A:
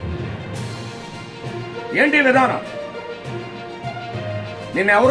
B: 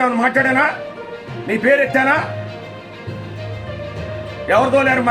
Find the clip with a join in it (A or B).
A